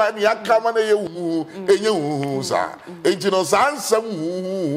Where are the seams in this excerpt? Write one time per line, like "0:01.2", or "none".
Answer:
none